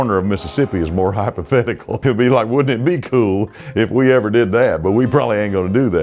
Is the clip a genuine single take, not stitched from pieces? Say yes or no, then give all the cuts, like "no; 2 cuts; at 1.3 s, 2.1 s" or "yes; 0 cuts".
no; 1 cut; at 1.9 s